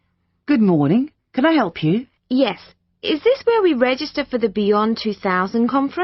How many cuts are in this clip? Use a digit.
1